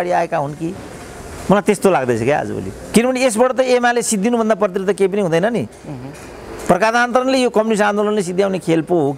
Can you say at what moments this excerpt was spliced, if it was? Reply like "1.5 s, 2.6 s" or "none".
none